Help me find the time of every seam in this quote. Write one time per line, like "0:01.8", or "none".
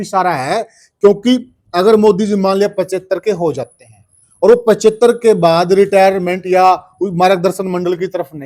none